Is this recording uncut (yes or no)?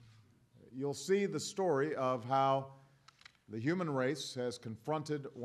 yes